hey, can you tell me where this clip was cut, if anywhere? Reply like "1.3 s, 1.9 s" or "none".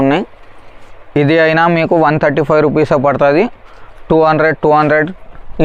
none